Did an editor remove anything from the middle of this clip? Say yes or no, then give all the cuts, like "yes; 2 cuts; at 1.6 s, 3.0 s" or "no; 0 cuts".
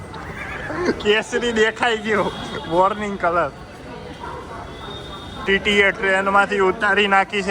yes; 1 cut; at 5.4 s